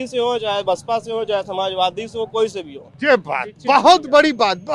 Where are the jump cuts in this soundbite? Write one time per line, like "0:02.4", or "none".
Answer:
none

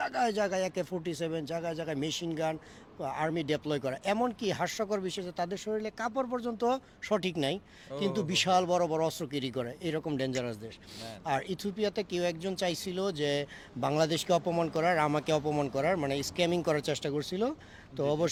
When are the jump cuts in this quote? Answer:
none

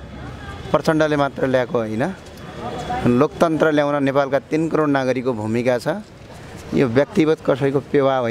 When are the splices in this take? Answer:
none

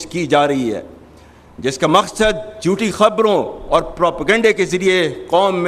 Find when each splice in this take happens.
none

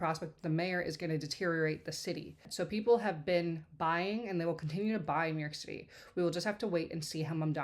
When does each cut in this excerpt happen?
0:02.5

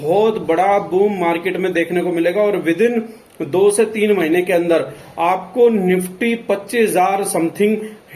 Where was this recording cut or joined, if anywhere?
none

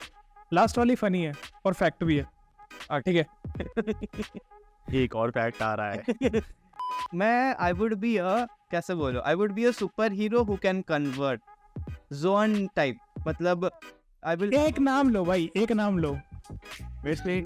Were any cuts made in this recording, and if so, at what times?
0:06.9

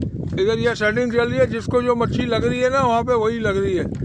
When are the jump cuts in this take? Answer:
none

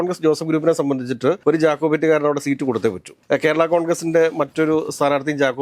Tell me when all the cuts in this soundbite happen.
none

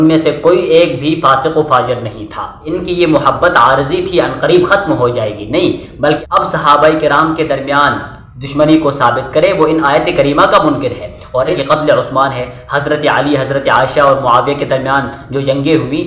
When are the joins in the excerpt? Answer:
0:02.6
0:06.2
0:11.5

